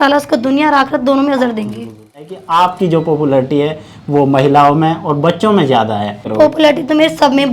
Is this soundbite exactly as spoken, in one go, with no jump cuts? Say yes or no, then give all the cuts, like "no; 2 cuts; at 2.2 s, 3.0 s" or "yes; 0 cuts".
no; 2 cuts; at 2.0 s, 6.3 s